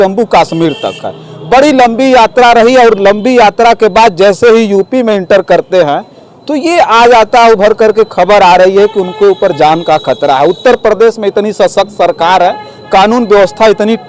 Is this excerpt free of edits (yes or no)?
yes